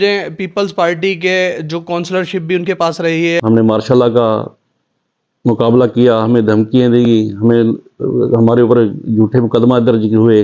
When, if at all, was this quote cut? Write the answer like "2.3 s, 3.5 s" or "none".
3.4 s